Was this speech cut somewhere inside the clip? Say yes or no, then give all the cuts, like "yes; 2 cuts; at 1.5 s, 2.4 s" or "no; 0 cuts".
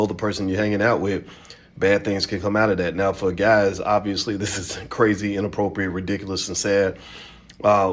no; 0 cuts